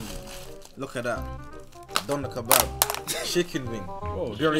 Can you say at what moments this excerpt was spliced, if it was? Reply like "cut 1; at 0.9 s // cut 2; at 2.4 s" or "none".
cut 1; at 1.8 s